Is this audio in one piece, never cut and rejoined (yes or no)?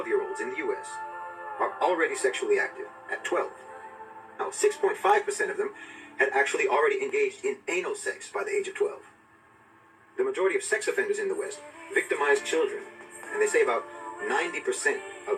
yes